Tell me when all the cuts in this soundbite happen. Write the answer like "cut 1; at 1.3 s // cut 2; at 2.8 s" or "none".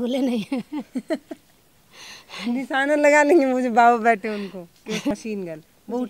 cut 1; at 5.1 s

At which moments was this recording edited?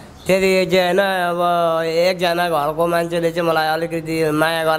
none

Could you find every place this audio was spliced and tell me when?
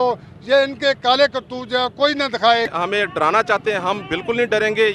cut 1; at 2.7 s

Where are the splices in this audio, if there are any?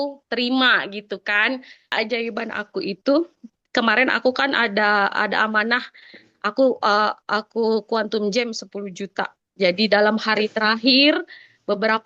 cut 1; at 1.9 s

